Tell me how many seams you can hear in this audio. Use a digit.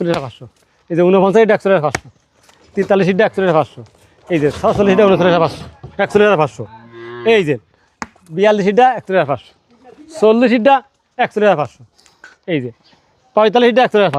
0